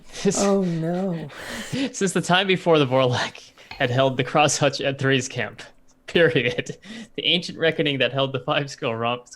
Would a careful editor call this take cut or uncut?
cut